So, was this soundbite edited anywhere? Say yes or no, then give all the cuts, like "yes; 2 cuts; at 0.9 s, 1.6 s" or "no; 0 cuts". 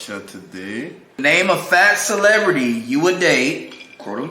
yes; 1 cut; at 1.2 s